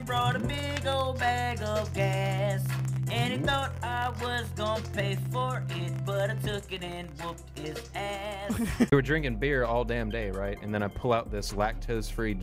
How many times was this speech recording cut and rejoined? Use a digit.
1